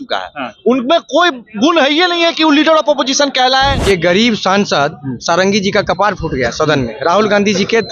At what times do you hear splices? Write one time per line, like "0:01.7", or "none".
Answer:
0:03.8